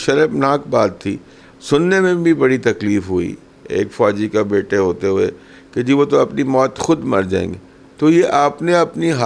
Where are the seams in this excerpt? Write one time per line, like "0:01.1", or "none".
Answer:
none